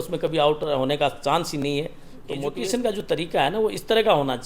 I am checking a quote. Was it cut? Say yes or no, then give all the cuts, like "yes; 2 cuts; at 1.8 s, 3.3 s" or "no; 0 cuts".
yes; 1 cut; at 2.5 s